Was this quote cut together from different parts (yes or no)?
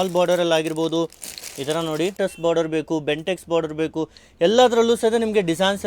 yes